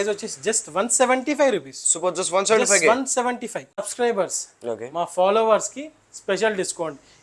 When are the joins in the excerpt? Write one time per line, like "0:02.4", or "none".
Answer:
0:03.9